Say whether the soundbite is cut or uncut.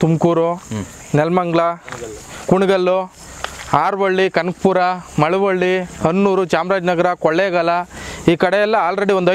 uncut